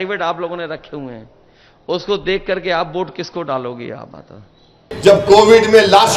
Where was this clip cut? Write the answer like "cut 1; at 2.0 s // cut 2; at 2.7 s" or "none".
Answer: cut 1; at 4.9 s